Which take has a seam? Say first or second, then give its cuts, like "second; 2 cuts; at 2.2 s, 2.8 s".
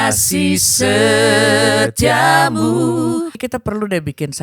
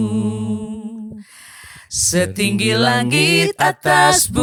first; 1 cut; at 3.4 s